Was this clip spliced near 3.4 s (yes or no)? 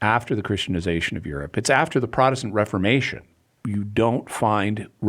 yes